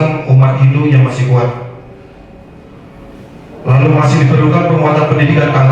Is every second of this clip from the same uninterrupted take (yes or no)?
yes